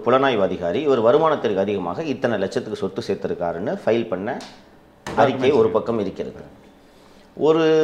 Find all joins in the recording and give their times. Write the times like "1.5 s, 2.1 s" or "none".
none